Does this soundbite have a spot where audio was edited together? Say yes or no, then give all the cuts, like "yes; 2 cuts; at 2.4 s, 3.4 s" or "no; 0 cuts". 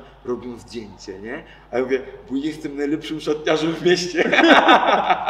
no; 0 cuts